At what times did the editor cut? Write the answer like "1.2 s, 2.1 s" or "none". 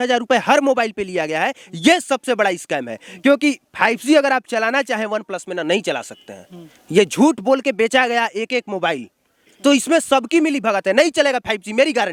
none